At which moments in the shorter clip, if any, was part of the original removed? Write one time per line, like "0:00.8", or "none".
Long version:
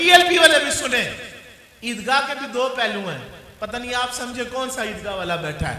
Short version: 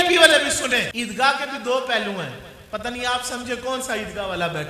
0:00.9